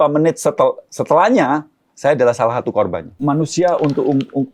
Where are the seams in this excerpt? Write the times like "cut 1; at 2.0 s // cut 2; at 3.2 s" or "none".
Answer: cut 1; at 3.2 s